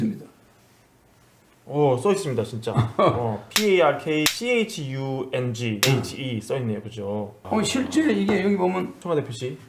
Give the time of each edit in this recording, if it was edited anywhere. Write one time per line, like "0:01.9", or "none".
none